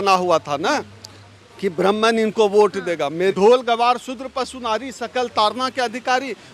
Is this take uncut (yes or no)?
no